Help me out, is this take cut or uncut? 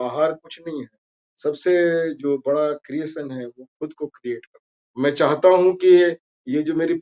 cut